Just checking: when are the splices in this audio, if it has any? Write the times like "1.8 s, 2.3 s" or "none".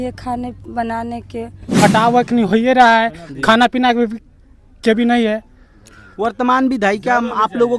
1.8 s